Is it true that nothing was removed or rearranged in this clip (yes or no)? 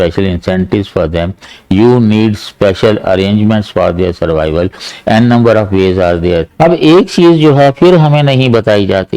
no